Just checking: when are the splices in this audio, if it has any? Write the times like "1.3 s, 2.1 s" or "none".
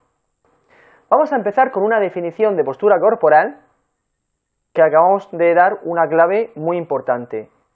6.3 s